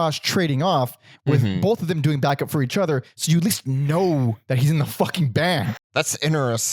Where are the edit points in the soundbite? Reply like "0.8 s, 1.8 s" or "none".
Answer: 5.8 s